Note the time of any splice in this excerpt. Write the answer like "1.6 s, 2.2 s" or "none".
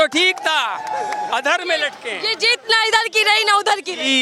none

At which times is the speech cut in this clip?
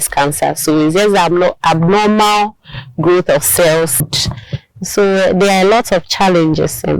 4.1 s

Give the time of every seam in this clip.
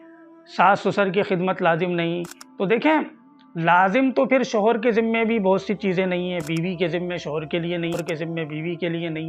7.9 s

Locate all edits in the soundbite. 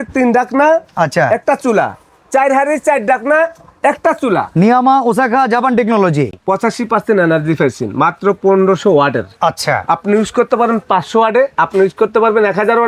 6.4 s

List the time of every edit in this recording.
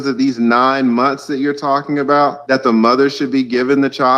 2.4 s

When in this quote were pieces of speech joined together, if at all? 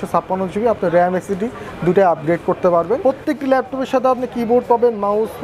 3.0 s

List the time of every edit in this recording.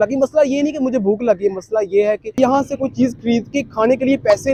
none

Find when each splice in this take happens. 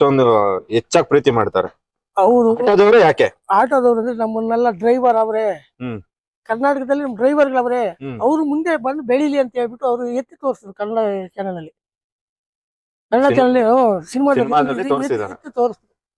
none

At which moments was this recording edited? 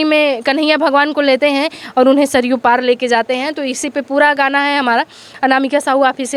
none

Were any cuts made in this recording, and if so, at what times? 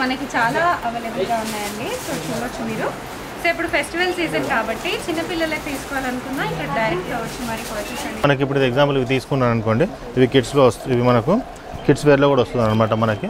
8.2 s

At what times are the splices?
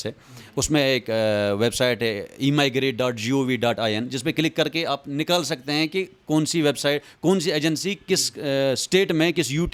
none

